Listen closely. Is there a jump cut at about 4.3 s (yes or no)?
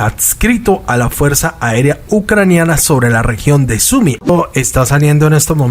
yes